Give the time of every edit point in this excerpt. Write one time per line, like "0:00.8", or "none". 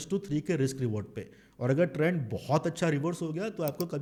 none